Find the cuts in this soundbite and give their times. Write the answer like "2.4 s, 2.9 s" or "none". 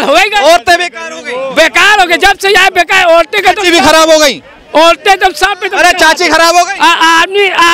none